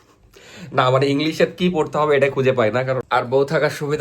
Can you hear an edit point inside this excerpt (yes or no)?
yes